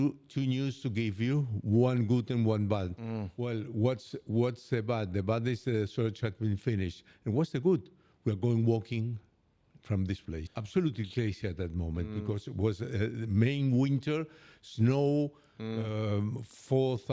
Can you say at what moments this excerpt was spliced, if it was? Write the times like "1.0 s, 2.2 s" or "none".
10.5 s